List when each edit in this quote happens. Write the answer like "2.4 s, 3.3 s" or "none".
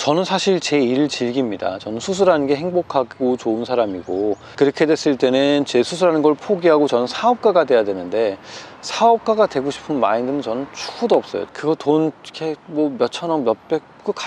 4.5 s, 11.5 s